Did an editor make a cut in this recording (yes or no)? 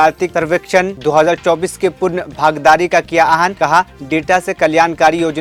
no